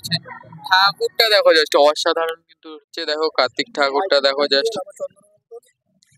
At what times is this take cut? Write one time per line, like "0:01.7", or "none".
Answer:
0:02.5